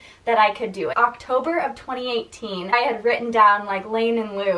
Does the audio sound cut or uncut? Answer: cut